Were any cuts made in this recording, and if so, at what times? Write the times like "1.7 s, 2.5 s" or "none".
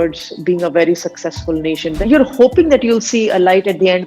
2.0 s